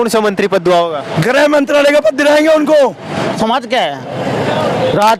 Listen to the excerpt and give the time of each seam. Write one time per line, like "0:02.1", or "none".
0:03.3

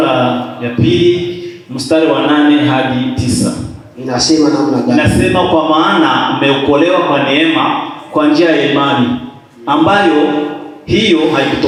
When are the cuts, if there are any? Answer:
none

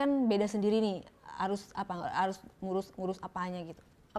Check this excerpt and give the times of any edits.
none

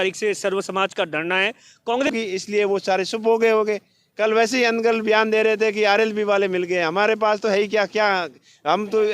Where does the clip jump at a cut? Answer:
0:02.1

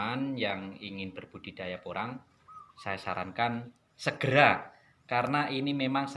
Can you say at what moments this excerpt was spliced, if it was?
none

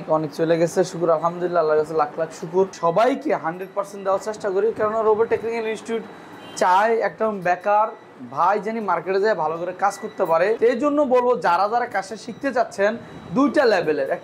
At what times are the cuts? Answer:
0:02.7
0:10.6

